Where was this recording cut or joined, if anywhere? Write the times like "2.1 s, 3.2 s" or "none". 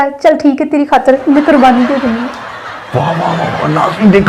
none